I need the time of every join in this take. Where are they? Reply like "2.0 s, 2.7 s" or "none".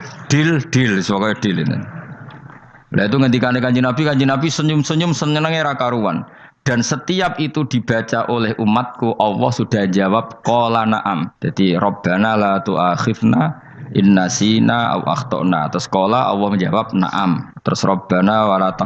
11.4 s, 17.5 s